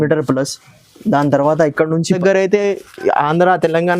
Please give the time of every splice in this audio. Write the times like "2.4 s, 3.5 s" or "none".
2.1 s